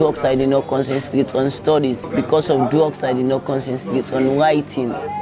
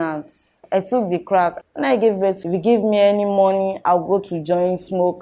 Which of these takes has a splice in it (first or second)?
second